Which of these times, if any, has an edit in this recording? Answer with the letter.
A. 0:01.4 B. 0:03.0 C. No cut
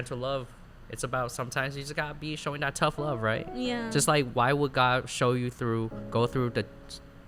C